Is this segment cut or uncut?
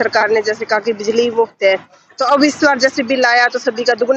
uncut